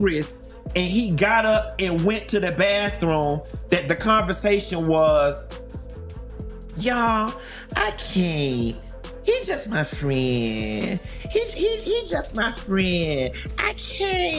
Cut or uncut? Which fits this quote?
uncut